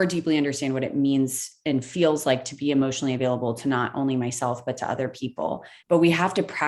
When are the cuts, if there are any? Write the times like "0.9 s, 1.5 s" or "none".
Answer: 5.7 s